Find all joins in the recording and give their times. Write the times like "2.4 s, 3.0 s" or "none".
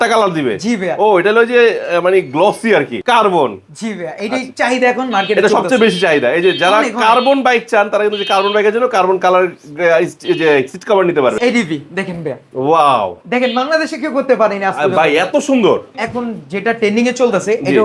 3.0 s, 11.4 s, 16.0 s